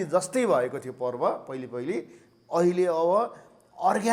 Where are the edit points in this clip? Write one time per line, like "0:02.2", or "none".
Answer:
none